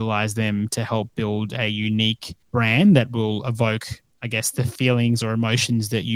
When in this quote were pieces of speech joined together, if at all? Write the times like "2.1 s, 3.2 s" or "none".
2.3 s